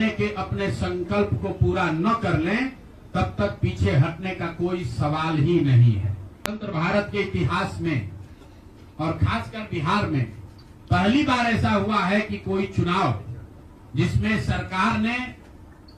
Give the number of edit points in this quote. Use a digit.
1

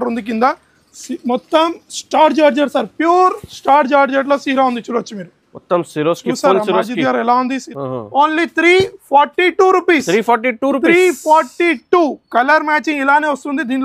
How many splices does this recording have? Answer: 1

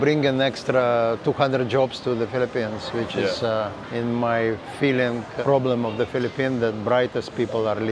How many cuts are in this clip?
2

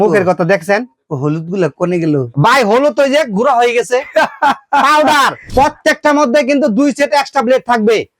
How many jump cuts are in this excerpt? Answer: 1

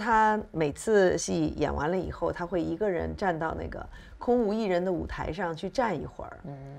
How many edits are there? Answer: 1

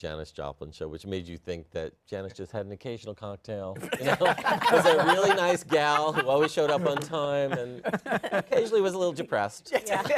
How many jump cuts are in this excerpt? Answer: 0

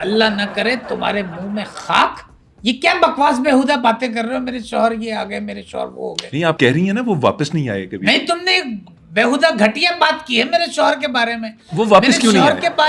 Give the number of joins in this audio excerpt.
0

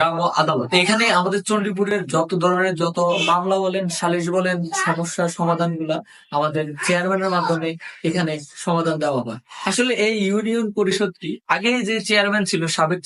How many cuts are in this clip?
0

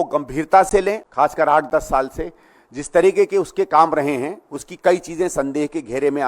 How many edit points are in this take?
1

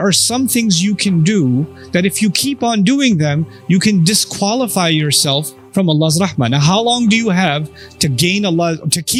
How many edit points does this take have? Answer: 0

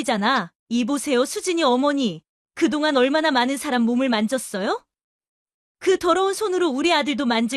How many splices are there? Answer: 0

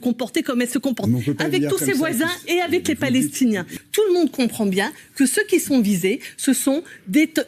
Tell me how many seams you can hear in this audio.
1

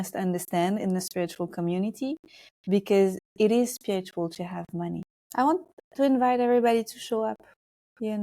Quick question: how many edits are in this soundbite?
1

